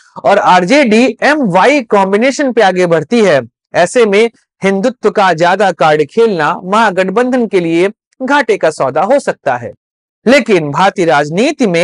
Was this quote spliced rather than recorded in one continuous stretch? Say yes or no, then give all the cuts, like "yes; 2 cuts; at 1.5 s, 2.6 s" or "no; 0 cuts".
no; 0 cuts